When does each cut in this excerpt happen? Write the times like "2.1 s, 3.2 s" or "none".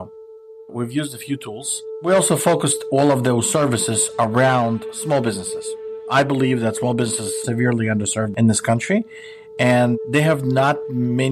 2.0 s